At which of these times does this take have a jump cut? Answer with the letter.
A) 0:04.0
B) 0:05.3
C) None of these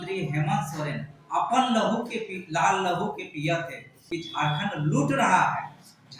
A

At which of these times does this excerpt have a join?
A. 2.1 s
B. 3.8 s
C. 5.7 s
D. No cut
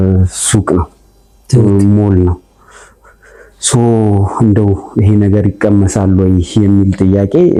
D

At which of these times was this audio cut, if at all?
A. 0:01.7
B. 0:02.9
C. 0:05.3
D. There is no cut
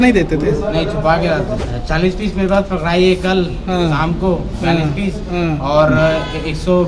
A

